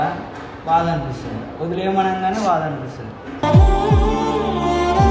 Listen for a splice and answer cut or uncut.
uncut